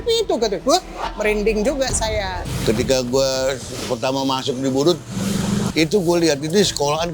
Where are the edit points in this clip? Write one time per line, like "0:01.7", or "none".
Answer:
0:05.7